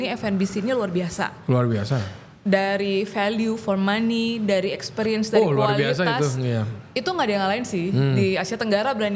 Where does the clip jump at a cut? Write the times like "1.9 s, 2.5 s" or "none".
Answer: none